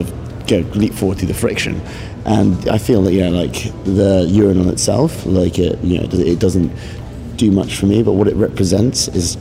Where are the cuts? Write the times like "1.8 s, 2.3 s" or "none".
none

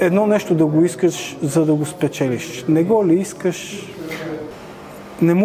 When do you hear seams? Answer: 4.5 s

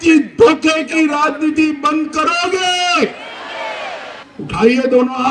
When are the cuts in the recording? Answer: 4.2 s

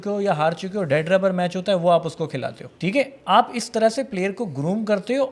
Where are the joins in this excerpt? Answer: 2.6 s

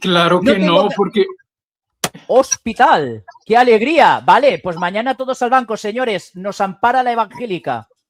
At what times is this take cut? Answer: none

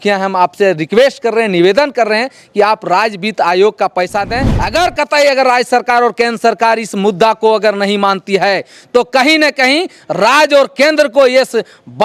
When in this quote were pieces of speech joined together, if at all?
4.5 s

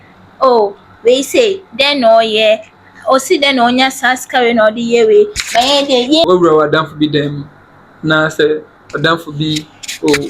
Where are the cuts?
6.2 s

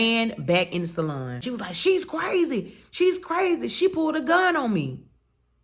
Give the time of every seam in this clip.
1.4 s

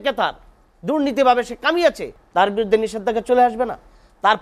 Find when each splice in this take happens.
2.1 s

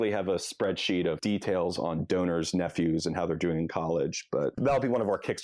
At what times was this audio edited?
1.2 s, 4.6 s

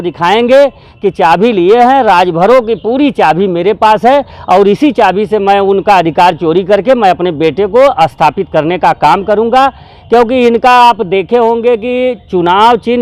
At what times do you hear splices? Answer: none

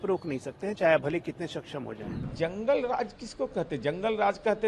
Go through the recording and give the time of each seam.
2.3 s

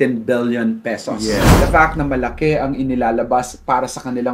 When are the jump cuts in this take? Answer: 1.5 s

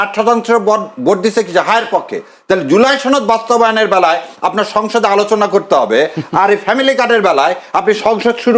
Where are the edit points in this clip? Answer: none

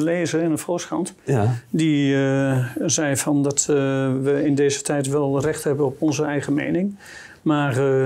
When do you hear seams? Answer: none

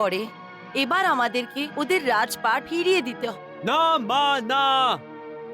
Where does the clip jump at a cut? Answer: 3.3 s

